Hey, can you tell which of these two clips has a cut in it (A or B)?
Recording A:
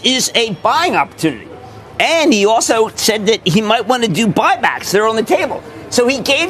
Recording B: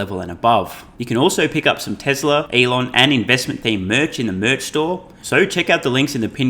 B